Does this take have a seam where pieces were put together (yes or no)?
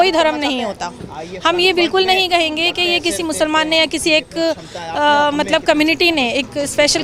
no